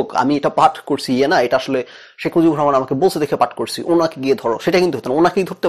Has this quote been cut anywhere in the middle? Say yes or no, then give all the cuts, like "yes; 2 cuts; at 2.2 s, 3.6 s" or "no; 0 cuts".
no; 0 cuts